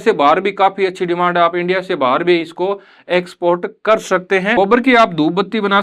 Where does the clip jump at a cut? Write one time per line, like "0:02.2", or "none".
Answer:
0:04.6